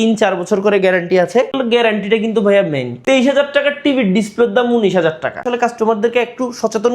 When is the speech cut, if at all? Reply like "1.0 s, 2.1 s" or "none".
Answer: 1.6 s, 2.9 s, 5.4 s